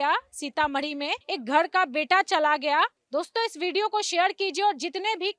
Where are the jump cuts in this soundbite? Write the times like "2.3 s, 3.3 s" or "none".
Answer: 1.2 s, 3.0 s